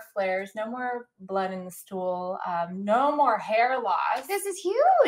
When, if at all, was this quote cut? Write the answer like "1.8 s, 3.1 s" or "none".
none